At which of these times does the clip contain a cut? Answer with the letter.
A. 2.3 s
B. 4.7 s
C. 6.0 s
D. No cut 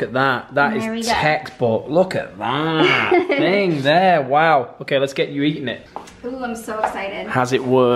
D